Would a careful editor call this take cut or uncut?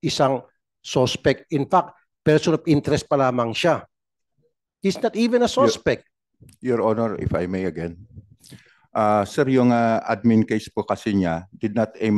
uncut